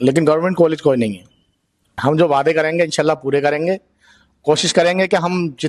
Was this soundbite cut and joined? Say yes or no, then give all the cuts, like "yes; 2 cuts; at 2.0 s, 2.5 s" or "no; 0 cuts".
yes; 1 cut; at 2.0 s